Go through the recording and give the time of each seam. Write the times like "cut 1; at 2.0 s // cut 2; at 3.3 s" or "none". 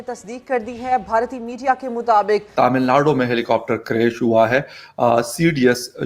cut 1; at 2.5 s